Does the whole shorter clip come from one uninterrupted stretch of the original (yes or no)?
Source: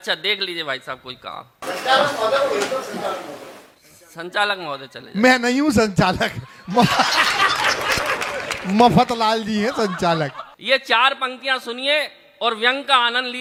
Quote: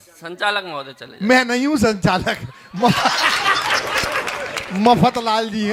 yes